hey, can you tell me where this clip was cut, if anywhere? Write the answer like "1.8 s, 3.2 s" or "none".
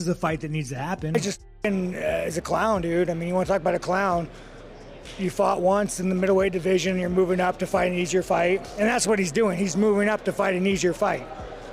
1.1 s